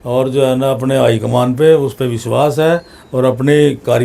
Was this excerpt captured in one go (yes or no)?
yes